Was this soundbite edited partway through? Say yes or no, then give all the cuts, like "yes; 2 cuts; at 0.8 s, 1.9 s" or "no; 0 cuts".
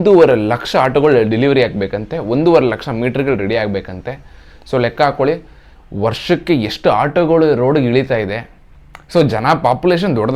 no; 0 cuts